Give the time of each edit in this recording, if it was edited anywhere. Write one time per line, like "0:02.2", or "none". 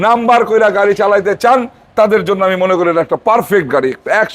none